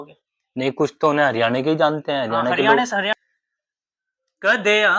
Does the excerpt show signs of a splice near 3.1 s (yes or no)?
yes